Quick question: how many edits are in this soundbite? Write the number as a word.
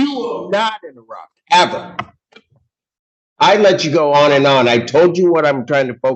zero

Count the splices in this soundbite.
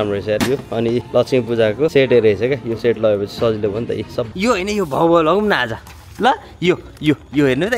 three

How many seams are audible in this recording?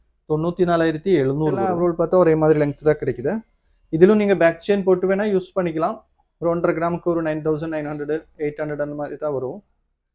one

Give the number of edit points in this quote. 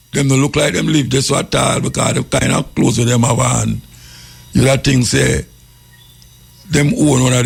zero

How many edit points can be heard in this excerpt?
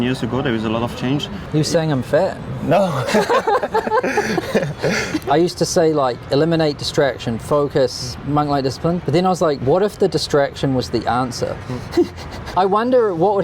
four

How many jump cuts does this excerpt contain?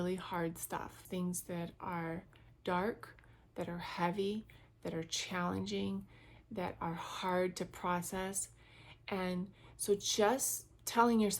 one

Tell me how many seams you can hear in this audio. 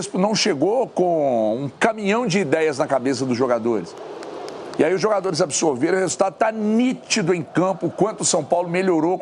zero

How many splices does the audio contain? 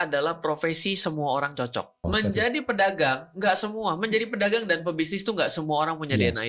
one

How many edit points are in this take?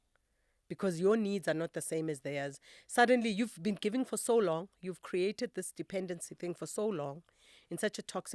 zero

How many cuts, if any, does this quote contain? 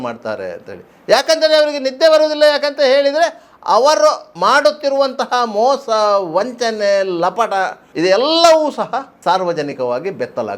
three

